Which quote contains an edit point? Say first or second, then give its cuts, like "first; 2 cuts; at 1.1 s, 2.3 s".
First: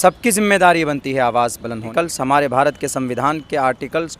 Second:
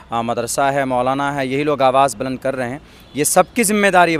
first; 1 cut; at 1.9 s